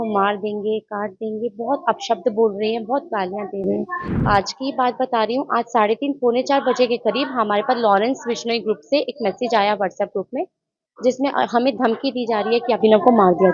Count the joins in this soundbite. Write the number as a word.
zero